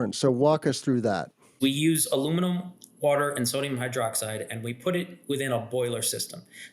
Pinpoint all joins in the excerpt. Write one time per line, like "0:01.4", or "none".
0:01.6